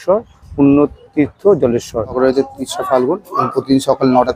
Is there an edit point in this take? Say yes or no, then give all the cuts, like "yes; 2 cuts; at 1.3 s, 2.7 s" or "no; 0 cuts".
yes; 1 cut; at 2.2 s